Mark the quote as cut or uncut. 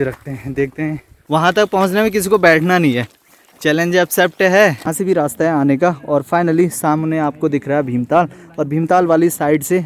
cut